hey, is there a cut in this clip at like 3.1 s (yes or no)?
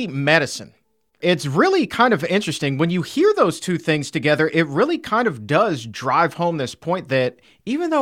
no